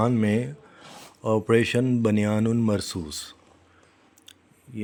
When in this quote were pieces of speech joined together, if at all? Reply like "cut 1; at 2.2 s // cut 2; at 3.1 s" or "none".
none